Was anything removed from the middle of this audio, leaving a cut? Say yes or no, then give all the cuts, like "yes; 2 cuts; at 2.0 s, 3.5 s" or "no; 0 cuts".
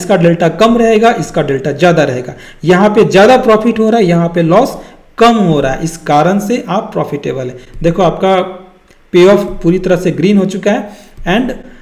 no; 0 cuts